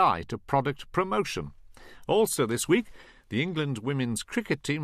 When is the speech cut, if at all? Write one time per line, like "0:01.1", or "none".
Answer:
0:03.1